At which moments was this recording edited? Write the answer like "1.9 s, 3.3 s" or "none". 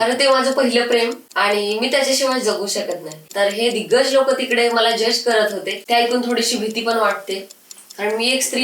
1.2 s, 3.2 s, 5.7 s